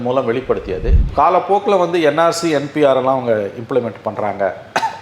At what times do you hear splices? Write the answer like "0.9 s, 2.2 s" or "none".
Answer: 0.9 s